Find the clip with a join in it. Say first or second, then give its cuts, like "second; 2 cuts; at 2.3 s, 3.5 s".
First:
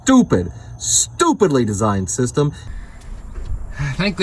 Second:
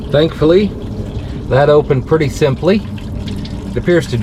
first; 1 cut; at 2.6 s